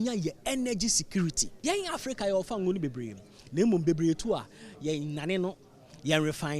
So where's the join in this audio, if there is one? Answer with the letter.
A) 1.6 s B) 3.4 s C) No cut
A